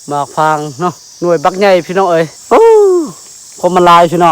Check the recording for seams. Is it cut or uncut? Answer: cut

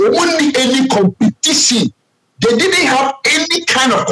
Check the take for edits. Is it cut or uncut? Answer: uncut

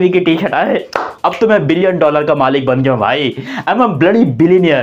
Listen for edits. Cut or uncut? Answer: uncut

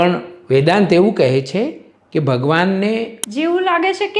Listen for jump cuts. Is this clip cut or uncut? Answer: cut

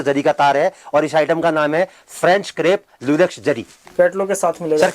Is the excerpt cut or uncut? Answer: cut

